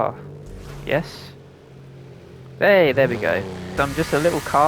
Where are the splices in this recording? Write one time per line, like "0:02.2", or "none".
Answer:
0:03.8